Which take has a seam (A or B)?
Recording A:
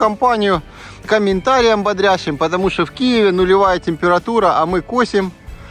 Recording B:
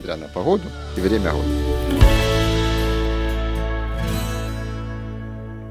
B